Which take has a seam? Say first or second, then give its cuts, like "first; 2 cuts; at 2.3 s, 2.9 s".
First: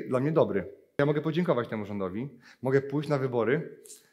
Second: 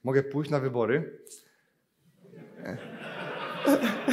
first; 1 cut; at 1.0 s